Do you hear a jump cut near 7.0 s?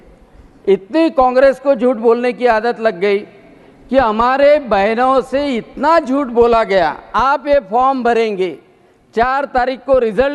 yes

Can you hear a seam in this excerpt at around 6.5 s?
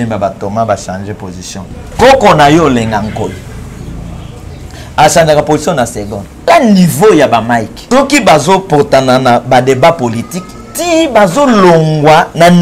yes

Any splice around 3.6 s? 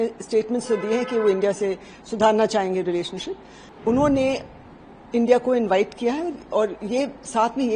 yes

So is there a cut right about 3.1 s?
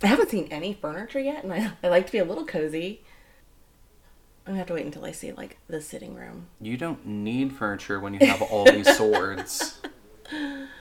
no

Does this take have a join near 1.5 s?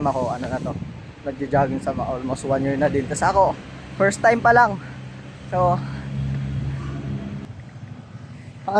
no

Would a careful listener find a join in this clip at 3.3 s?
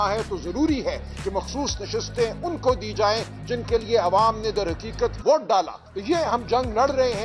no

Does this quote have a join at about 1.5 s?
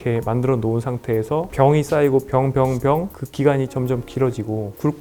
yes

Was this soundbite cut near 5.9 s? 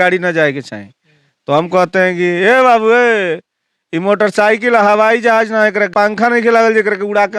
yes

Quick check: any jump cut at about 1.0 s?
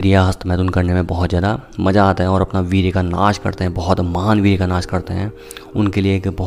no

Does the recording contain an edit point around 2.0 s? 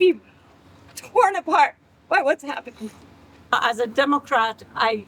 no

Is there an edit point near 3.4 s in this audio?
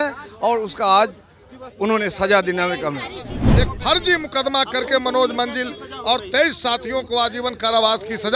yes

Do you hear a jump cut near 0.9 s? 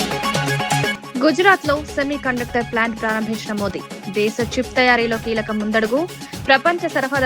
yes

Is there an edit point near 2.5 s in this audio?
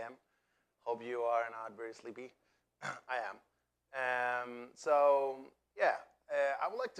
yes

